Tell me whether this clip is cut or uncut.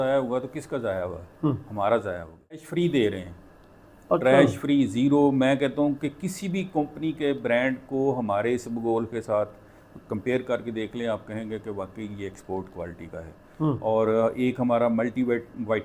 cut